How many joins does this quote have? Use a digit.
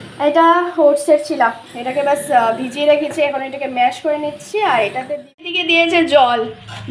1